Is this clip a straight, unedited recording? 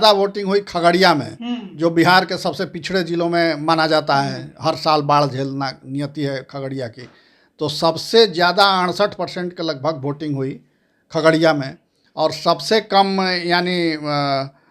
yes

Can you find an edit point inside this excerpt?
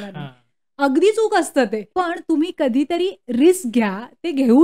yes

